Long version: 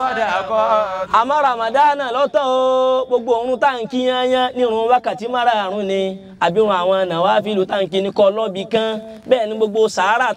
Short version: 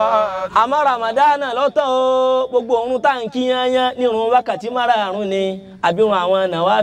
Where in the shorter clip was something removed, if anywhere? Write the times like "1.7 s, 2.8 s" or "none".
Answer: none